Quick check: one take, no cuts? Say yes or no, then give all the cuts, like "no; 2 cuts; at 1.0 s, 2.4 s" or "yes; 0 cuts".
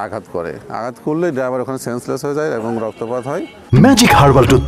yes; 0 cuts